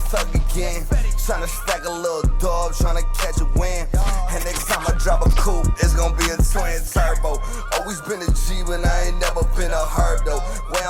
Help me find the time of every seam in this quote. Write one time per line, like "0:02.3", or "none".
none